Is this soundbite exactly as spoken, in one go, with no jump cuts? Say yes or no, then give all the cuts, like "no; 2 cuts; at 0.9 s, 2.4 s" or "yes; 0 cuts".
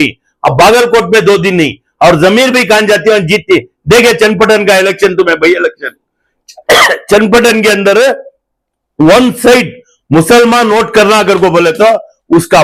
yes; 0 cuts